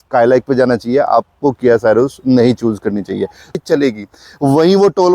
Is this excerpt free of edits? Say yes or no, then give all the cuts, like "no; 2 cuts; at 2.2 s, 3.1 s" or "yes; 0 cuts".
no; 1 cut; at 3.6 s